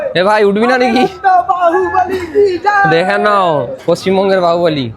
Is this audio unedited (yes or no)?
yes